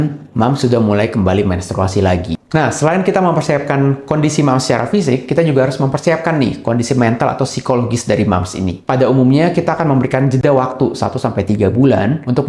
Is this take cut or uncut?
cut